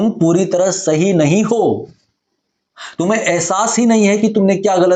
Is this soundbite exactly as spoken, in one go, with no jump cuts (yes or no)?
yes